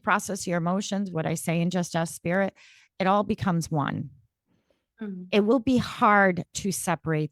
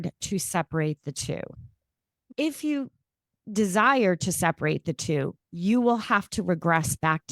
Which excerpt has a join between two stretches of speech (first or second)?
second